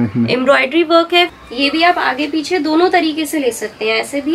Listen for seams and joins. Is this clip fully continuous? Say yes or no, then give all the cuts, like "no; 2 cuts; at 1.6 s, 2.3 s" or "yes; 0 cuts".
no; 1 cut; at 1.3 s